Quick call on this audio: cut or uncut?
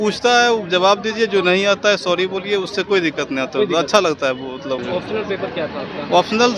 cut